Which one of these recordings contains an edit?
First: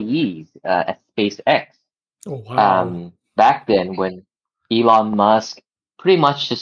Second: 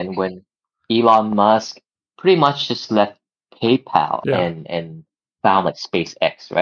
second; 1 cut; at 4.2 s

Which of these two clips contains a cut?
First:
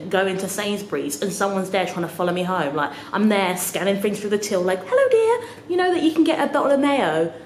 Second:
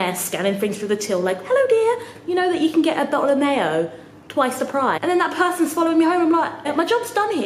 second; 2 cuts; at 5.0 s, 6.7 s

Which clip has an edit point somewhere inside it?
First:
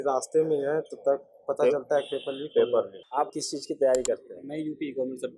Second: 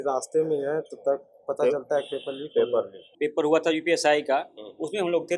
second; 1 cut; at 3.0 s

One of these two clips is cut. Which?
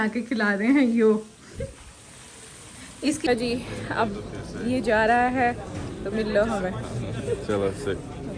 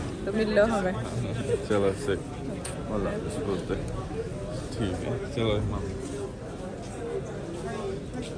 first; 1 cut; at 3.3 s

